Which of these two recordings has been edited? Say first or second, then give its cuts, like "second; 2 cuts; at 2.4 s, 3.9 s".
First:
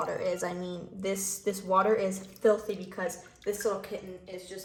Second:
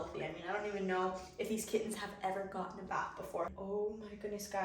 second; 1 cut; at 3.6 s